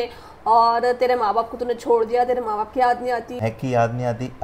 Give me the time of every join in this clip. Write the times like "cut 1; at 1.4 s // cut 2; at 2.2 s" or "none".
cut 1; at 3.5 s